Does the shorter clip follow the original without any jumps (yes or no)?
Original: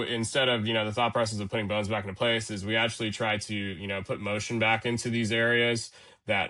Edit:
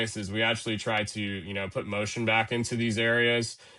yes